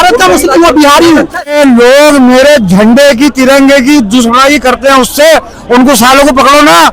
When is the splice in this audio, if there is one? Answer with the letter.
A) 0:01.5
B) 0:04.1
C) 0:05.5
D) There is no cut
A